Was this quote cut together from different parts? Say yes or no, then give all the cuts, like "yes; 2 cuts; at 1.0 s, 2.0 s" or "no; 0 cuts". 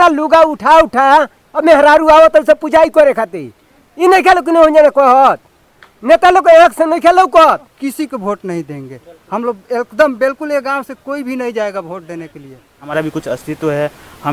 yes; 2 cuts; at 7.7 s, 12.9 s